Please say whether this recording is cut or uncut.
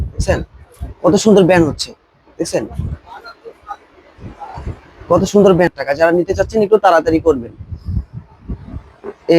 cut